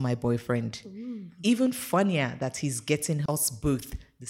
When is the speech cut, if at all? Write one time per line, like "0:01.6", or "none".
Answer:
0:03.2

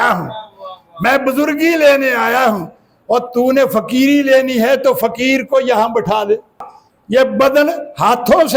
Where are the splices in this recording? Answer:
0:06.7

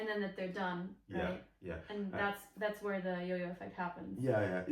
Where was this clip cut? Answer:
none

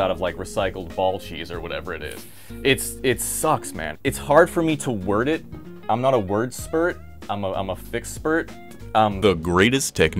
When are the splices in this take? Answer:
none

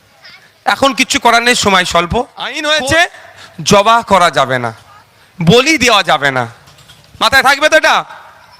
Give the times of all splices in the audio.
0:02.4

